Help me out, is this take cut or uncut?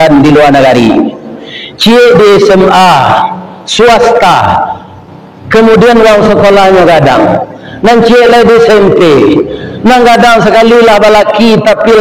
uncut